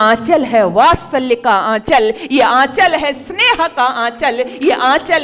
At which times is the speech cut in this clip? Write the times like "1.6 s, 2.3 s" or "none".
none